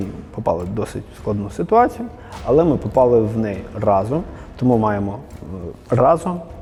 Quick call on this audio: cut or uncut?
uncut